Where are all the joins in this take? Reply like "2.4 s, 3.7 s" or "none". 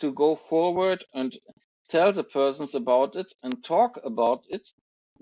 none